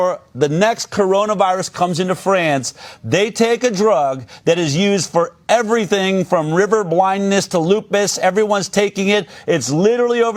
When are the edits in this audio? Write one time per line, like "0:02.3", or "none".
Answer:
none

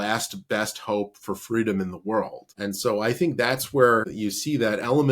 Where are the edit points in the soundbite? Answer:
0:02.4
0:04.1

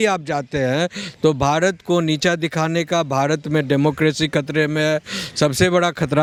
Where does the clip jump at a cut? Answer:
none

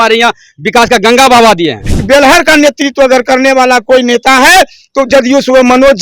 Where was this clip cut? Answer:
0:01.9

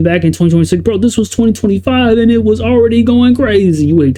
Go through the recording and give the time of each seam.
none

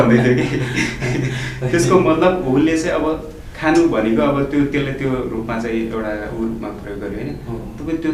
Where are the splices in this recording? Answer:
none

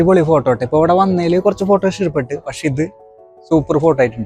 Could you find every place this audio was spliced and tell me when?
none

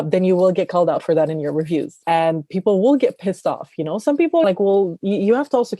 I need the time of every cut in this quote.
0:02.0
0:04.4

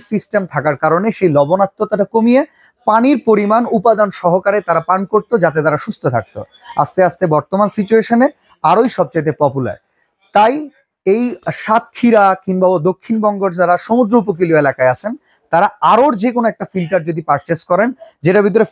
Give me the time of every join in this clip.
none

